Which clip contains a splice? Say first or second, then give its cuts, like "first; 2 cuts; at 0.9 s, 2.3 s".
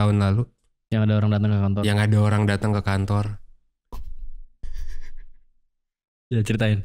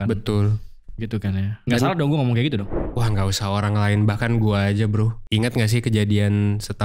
second; 1 cut; at 2.7 s